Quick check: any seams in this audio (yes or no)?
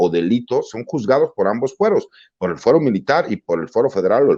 no